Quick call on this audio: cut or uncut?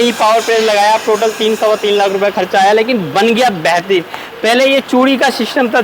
uncut